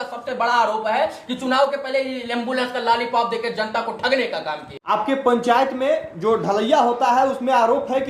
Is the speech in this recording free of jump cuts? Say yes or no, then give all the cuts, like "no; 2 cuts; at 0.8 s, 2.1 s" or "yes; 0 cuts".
no; 1 cut; at 4.7 s